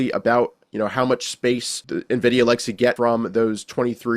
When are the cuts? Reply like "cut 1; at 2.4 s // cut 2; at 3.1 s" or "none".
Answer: cut 1; at 1.8 s // cut 2; at 3.0 s